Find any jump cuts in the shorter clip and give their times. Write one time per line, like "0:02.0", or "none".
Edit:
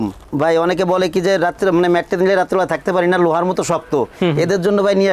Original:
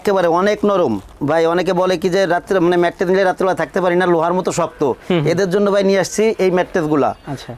none